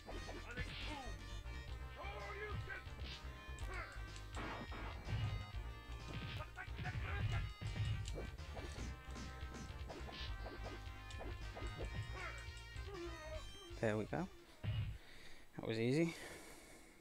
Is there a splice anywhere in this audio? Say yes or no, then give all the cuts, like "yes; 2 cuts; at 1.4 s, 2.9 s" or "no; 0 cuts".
no; 0 cuts